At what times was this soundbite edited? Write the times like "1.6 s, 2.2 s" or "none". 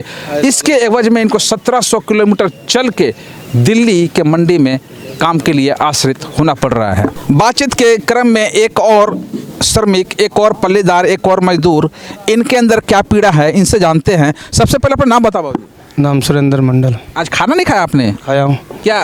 none